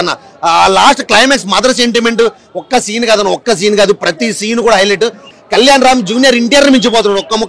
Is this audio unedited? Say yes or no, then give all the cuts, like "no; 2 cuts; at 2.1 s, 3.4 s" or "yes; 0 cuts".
no; 1 cut; at 5.3 s